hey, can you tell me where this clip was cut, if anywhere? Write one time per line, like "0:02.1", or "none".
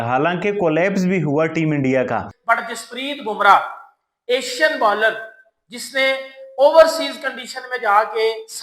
0:02.3